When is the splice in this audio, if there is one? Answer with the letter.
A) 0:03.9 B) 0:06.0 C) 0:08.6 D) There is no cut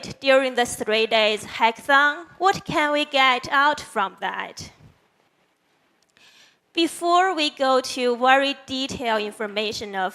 C